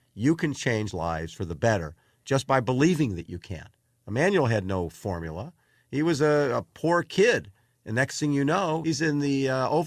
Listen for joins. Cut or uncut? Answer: cut